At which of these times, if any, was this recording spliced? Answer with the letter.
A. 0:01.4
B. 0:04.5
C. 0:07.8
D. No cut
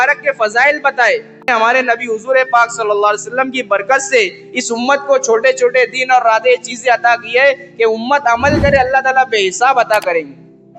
A